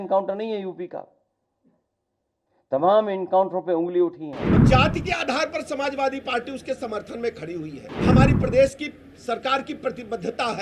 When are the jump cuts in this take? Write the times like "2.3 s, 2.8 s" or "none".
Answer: 4.6 s, 7.9 s